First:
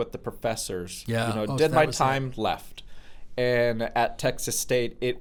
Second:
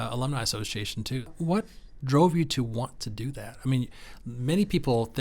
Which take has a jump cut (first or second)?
second